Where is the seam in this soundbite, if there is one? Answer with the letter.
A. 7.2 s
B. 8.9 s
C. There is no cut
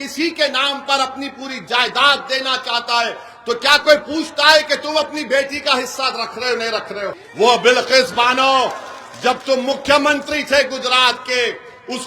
A